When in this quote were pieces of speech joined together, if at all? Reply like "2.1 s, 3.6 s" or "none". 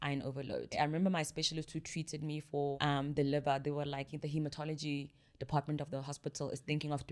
0.7 s, 2.8 s, 4.1 s